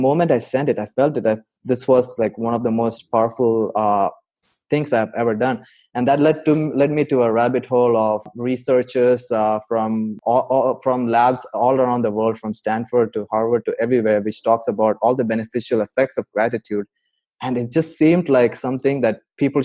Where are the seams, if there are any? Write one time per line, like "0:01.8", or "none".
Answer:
0:08.3
0:10.1